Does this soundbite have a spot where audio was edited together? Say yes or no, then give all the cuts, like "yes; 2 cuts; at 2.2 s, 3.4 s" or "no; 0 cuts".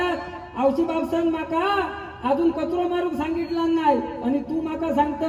no; 0 cuts